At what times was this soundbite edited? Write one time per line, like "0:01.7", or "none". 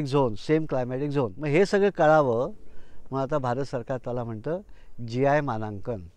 0:01.4

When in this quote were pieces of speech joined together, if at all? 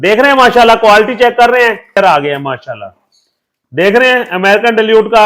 0:02.0

